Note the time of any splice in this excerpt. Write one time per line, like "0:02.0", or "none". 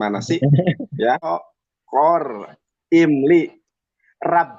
0:01.3